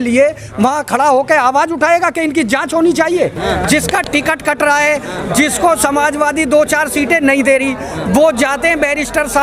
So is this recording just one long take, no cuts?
no; 1 cut; at 3.4 s

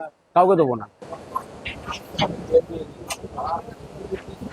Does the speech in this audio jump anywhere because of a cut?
no; 0 cuts

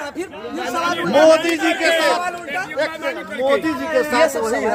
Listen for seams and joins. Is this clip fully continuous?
yes; 0 cuts

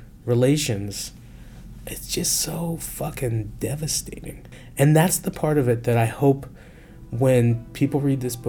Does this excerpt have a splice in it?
yes; 1 cut; at 4.5 s

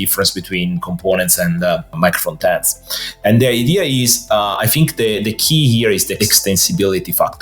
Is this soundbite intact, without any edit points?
no; 2 cuts; at 1.9 s, 6.1 s

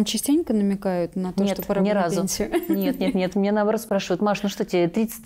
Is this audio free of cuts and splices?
yes; 0 cuts

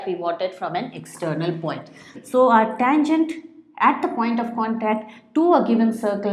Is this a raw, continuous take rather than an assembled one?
no; 1 cut; at 2.1 s

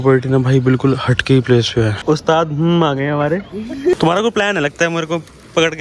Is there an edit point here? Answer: yes; 2 cuts; at 2.0 s, 3.9 s

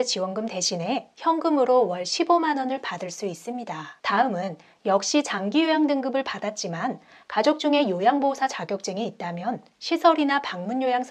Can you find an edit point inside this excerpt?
no; 0 cuts

